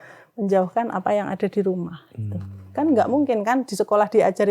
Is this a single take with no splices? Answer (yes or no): yes